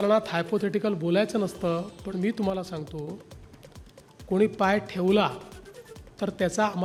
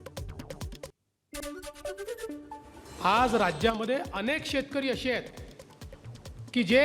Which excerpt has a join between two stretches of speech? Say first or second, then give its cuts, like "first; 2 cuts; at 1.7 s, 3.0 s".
second; 2 cuts; at 0.9 s, 2.8 s